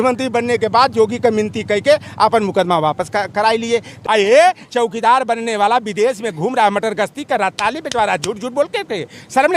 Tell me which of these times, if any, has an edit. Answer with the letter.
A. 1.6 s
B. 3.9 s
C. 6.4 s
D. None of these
B